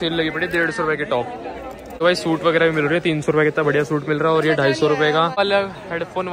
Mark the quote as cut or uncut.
cut